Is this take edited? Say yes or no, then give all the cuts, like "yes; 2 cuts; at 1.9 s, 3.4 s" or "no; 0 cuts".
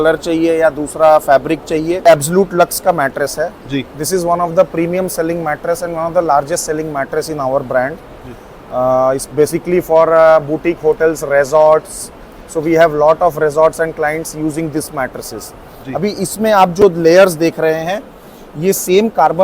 yes; 1 cut; at 2.0 s